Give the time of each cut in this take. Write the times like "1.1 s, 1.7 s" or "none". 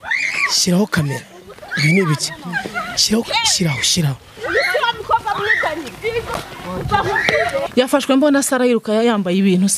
7.7 s